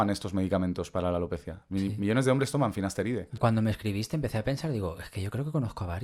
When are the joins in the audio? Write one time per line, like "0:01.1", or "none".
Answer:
none